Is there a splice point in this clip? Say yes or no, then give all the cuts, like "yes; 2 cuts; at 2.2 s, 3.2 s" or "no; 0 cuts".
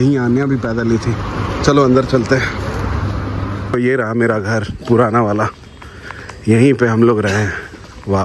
yes; 1 cut; at 3.7 s